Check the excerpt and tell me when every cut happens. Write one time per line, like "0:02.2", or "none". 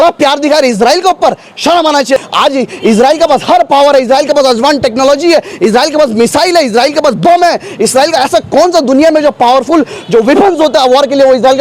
0:02.2